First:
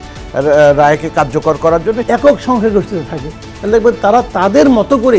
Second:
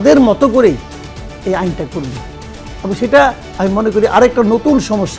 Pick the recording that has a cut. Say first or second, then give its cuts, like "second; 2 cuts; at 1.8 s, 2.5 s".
first; 1 cut; at 2.0 s